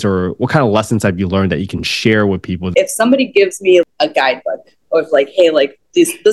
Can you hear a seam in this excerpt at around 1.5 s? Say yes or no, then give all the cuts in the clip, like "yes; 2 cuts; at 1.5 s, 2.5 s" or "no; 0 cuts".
no; 2 cuts; at 2.7 s, 3.8 s